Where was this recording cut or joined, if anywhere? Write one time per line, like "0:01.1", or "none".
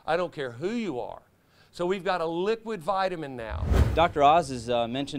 0:03.8